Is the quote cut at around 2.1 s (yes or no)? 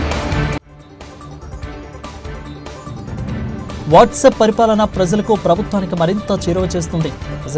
yes